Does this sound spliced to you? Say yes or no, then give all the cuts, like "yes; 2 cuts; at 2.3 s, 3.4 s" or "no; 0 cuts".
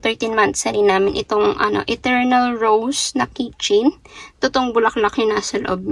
no; 0 cuts